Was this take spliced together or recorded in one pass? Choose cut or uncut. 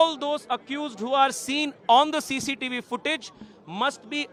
uncut